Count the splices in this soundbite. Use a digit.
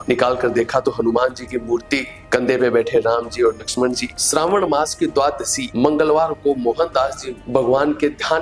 1